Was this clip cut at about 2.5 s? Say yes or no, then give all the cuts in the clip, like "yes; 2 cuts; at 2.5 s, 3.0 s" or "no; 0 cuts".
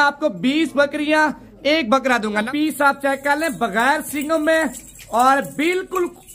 yes; 1 cut; at 2.5 s